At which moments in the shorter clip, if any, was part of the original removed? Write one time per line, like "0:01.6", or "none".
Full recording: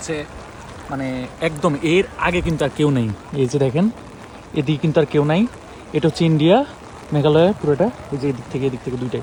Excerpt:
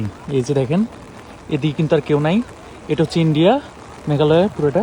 none

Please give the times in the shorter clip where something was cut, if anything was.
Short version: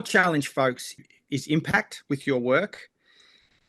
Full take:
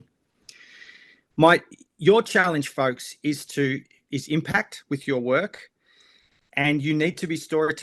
0:01.0

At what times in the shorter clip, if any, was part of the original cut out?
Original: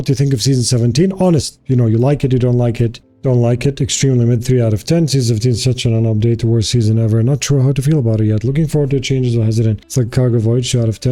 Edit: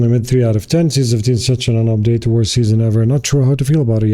none

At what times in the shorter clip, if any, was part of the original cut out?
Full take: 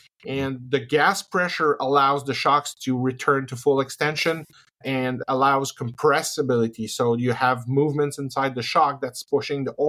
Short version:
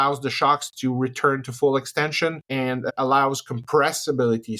0:02.8

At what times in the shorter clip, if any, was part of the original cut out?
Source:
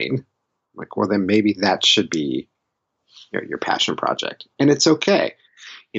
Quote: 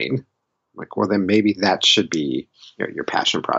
0:02.6

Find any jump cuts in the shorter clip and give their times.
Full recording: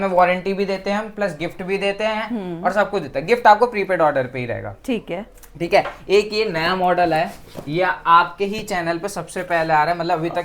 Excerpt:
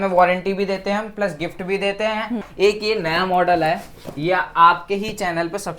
0:02.5

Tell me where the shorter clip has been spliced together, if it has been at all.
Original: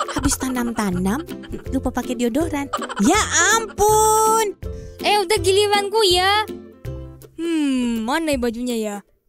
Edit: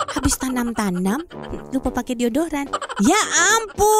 none

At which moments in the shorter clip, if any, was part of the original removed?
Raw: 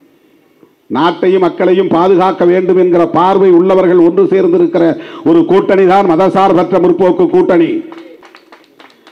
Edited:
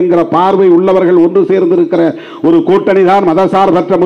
none

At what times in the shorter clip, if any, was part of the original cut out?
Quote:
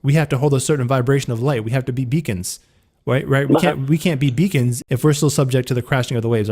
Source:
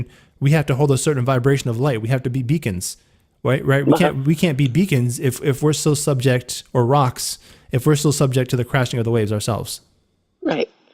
0:04.8

